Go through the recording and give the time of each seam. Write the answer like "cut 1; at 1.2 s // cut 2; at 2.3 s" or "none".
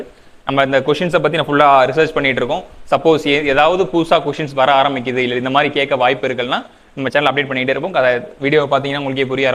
none